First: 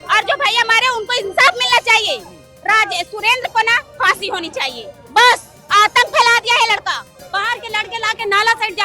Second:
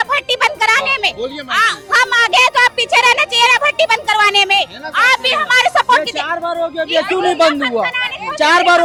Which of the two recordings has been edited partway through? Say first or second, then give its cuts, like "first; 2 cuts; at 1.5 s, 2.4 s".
first; 1 cut; at 7.1 s